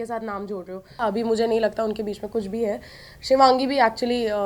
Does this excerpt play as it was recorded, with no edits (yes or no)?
no